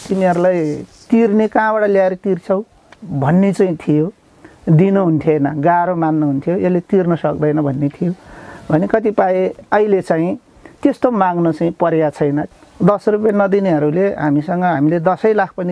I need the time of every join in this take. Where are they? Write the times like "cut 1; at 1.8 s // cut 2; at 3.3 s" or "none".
cut 1; at 2.9 s // cut 2; at 12.5 s